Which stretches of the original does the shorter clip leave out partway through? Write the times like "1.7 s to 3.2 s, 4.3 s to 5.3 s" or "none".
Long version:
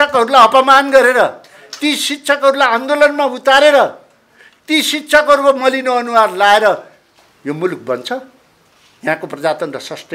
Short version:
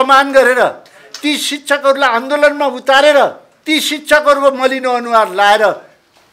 4.1 s to 4.5 s